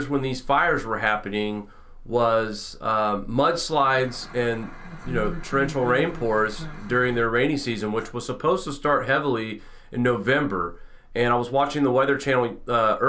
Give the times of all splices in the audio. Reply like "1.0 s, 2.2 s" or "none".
none